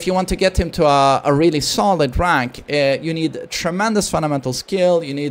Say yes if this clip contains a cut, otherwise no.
no